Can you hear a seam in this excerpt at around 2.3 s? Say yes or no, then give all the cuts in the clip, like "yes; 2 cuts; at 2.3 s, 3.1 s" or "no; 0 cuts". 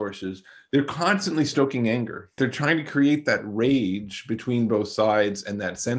yes; 1 cut; at 2.3 s